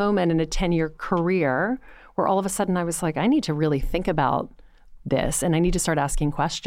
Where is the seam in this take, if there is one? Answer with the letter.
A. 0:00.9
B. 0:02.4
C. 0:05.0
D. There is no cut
D